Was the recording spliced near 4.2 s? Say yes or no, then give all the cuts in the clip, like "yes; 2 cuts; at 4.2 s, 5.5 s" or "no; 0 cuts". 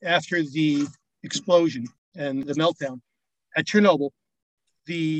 no; 1 cut; at 2.4 s